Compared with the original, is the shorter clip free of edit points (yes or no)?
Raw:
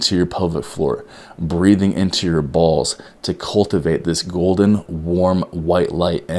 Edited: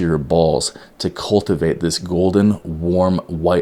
yes